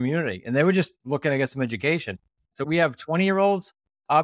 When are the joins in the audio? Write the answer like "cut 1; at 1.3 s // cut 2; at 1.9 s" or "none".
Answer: cut 1; at 2.6 s